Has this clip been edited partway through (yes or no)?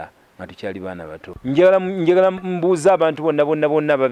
yes